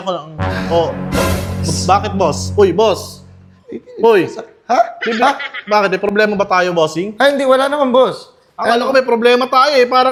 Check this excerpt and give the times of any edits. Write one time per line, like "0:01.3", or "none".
none

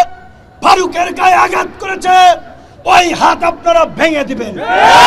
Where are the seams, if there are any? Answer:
none

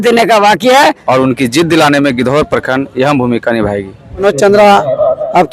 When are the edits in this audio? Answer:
0:01.0
0:04.2

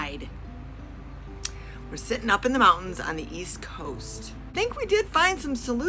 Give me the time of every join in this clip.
0:04.5

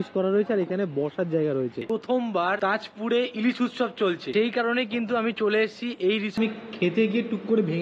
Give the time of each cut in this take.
0:01.9
0:06.3

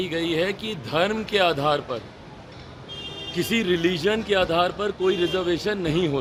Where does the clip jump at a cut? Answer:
none

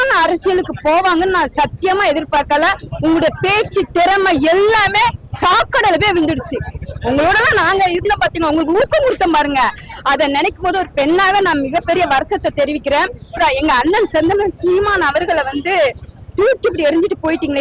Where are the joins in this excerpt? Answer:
0:13.4

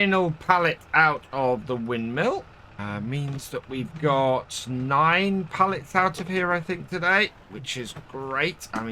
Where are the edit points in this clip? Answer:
0:02.6

